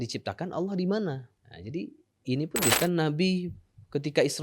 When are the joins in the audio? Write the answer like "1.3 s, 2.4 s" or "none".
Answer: 2.8 s